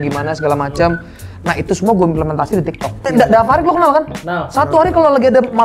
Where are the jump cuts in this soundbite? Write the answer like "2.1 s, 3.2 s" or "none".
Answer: 3.0 s